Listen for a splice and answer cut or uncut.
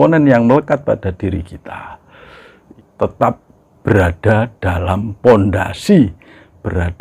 cut